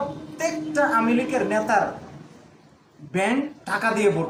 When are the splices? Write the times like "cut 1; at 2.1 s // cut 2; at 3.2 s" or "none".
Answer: none